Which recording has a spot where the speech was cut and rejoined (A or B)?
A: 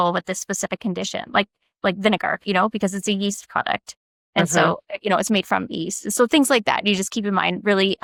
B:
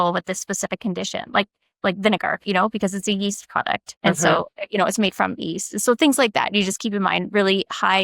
B